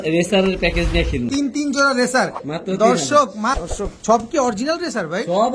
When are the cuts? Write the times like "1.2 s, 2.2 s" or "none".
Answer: 1.3 s, 3.6 s